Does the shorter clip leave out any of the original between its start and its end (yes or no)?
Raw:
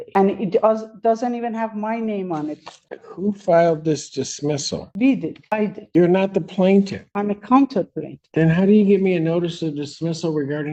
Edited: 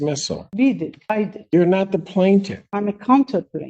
no